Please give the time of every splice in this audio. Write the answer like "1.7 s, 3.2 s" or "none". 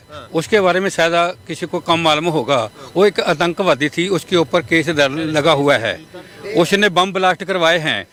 none